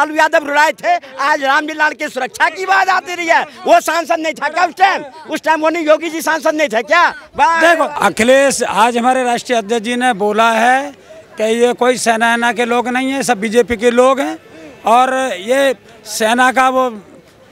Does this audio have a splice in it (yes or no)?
yes